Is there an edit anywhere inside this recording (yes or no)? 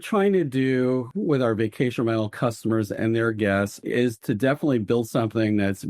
yes